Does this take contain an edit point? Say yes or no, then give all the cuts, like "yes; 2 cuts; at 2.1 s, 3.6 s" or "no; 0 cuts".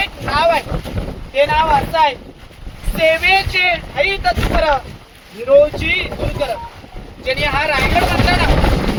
no; 0 cuts